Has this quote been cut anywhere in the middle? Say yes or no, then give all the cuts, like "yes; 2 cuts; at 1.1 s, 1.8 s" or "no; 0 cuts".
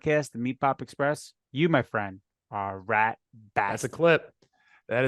yes; 1 cut; at 3.7 s